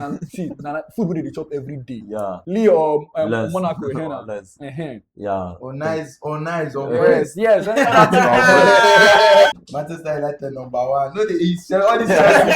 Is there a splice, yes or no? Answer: yes